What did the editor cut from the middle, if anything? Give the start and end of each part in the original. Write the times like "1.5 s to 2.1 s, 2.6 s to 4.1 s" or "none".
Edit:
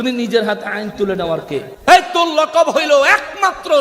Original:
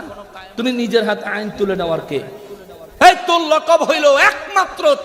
2.3 s to 2.9 s